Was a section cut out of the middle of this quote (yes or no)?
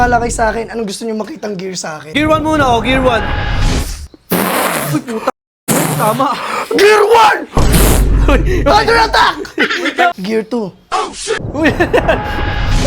yes